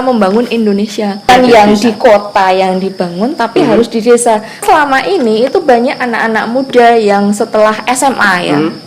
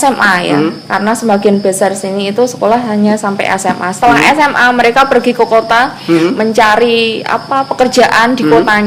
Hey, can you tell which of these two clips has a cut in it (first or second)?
first